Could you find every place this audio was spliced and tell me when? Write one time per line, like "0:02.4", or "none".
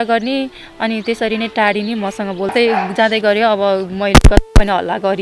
0:02.5